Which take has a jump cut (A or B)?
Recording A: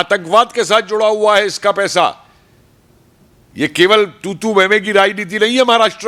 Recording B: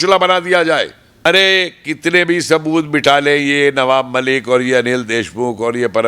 B